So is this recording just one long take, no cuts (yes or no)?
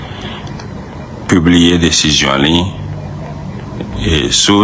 yes